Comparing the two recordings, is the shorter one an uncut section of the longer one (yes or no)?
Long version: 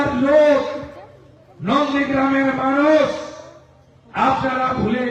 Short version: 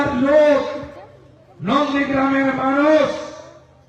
yes